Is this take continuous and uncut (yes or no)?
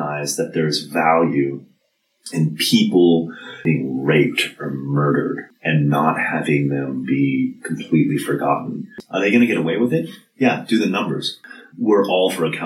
no